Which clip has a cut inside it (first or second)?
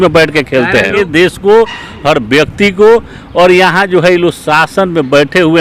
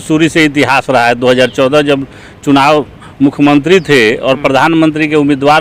first